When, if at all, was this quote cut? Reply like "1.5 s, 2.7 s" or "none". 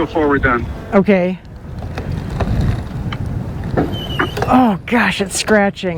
none